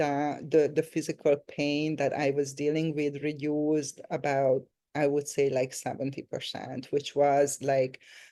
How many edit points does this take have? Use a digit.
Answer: 0